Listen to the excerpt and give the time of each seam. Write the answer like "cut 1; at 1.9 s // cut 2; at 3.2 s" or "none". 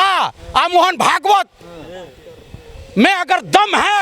none